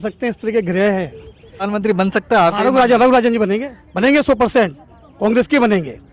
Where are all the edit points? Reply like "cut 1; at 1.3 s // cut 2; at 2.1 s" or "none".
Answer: cut 1; at 1.7 s